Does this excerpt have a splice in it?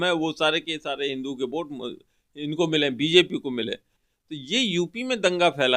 yes; 1 cut; at 4.1 s

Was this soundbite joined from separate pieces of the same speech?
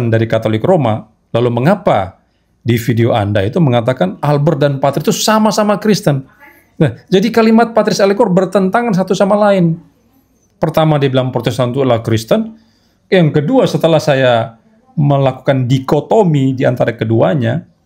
no; 0 cuts

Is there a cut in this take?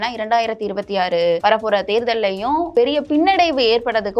yes; 2 cuts; at 1.4 s, 2.7 s

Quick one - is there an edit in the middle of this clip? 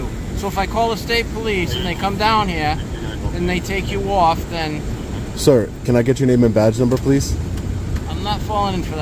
no; 0 cuts

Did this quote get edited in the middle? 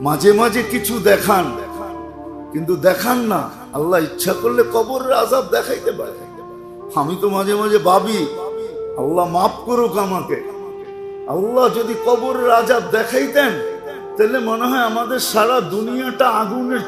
no; 0 cuts

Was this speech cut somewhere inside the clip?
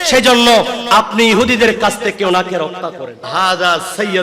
yes; 1 cut; at 3.2 s

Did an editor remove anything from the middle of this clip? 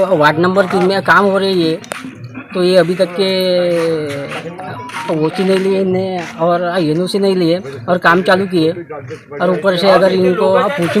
no; 0 cuts

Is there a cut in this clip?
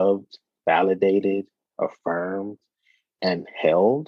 no; 0 cuts

